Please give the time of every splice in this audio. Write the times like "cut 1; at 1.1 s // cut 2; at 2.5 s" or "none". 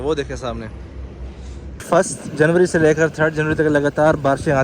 cut 1; at 1.8 s

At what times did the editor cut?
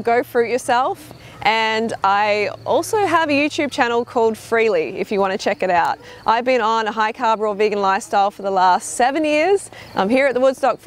cut 1; at 2.7 s

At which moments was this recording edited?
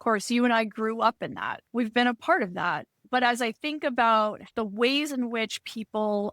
cut 1; at 1.6 s // cut 2; at 2.9 s // cut 3; at 4.5 s

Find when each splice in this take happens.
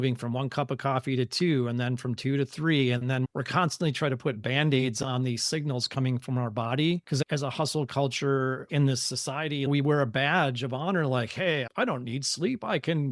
cut 1; at 7.0 s // cut 2; at 9.7 s

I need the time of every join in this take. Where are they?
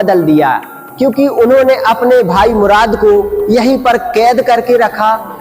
none

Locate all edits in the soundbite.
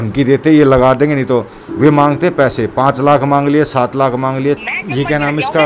cut 1; at 4.6 s

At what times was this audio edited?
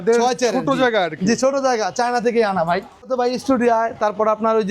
cut 1; at 3.1 s

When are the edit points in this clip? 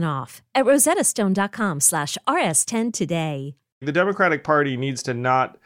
cut 1; at 3.9 s

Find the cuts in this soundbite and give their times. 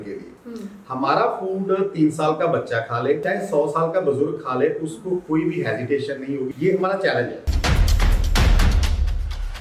cut 1; at 3.2 s // cut 2; at 6.5 s // cut 3; at 7.5 s

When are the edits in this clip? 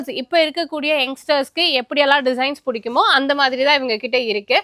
none

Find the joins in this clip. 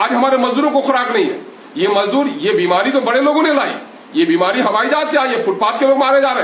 none

